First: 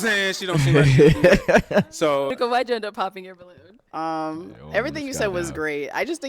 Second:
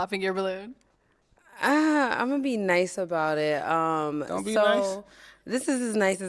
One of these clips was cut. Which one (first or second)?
first